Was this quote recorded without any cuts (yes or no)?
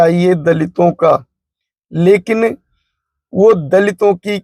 yes